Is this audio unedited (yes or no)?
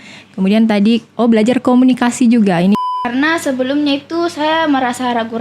no